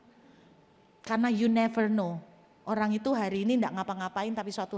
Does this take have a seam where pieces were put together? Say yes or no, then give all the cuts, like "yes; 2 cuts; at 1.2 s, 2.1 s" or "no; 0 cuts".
no; 0 cuts